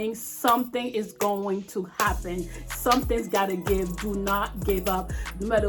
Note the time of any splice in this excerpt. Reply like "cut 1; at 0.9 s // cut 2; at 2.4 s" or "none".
none